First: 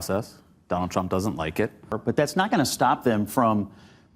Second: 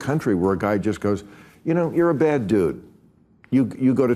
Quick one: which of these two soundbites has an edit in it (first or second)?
first